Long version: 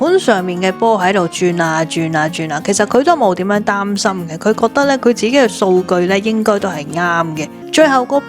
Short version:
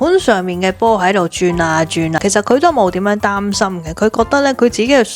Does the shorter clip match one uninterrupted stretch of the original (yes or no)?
no